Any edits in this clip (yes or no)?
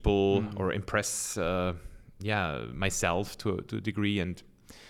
no